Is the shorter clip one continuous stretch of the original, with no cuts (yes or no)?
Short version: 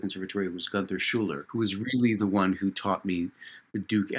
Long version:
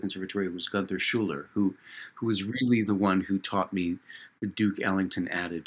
no